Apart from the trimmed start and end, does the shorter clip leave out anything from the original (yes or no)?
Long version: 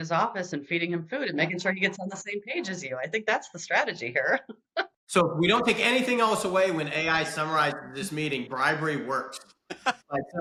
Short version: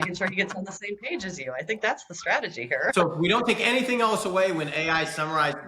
yes